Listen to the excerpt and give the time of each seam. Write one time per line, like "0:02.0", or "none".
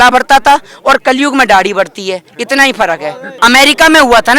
0:03.4

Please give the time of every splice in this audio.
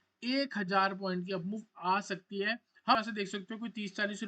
0:03.0

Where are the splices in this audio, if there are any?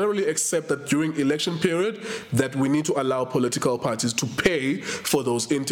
none

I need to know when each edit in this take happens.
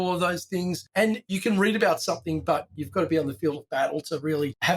0:01.3
0:02.7

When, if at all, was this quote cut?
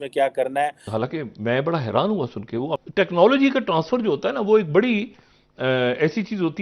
0:00.9
0:02.6

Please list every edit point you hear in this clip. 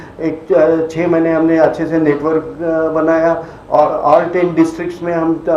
none

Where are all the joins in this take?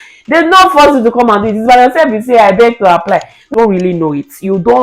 0:03.4

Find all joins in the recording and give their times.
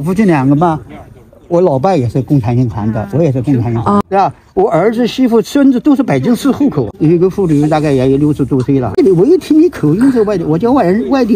0:04.0
0:06.9
0:09.0

